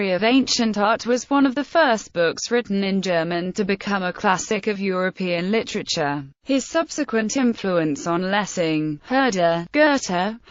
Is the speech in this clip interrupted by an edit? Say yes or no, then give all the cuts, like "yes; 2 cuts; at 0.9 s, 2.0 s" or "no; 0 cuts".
no; 0 cuts